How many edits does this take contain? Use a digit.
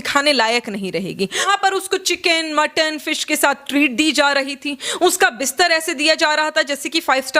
1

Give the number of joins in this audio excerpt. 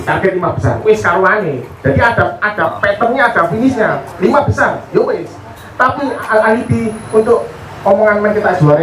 0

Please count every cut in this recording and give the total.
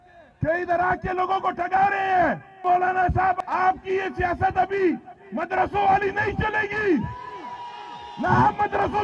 2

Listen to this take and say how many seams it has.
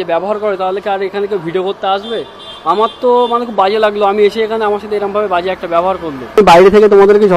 0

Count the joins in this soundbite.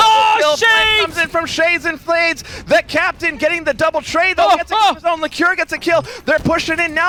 0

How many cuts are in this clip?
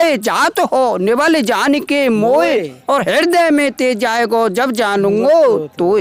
0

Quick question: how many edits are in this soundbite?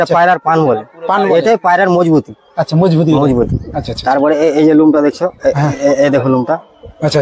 0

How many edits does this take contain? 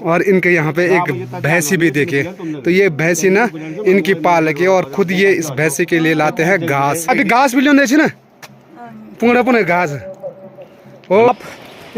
2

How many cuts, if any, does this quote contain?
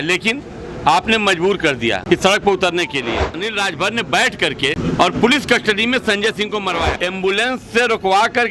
4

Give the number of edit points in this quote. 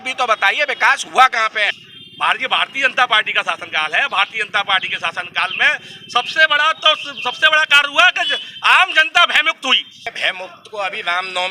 2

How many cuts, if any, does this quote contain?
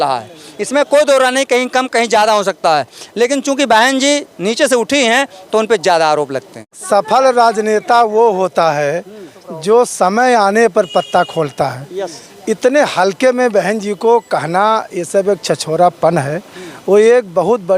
1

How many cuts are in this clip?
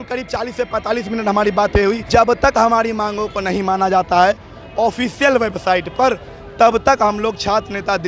1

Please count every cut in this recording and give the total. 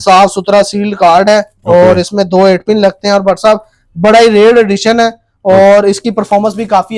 0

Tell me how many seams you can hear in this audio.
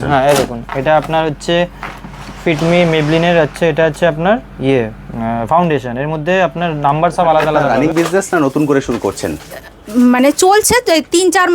1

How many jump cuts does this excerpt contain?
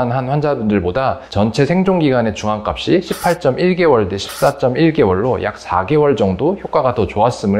0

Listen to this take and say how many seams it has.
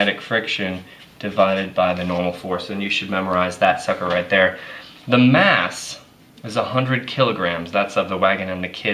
1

